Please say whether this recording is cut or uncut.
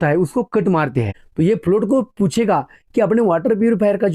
cut